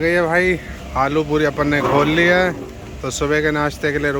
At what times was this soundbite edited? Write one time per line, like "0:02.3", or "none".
none